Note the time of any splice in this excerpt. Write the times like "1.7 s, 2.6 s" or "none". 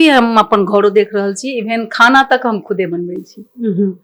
none

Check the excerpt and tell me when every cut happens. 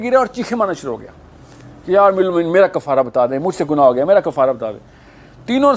none

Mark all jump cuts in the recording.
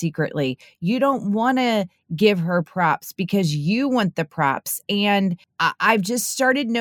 5.5 s

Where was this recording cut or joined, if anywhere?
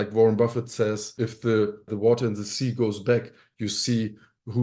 1.1 s

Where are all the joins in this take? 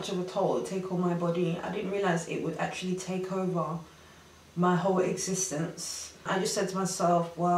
6.2 s

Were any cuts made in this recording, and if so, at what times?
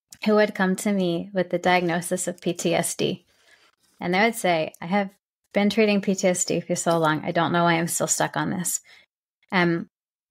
none

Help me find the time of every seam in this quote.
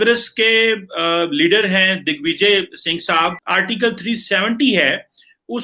3.4 s

